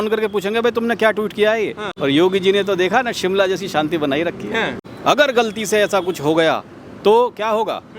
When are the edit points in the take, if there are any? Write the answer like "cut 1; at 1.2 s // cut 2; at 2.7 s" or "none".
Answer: cut 1; at 1.8 s // cut 2; at 4.8 s